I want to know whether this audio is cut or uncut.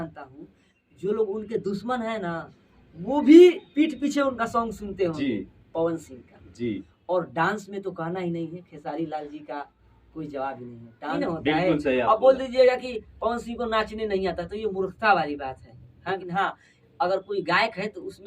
cut